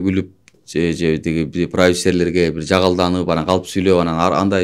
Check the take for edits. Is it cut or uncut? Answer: uncut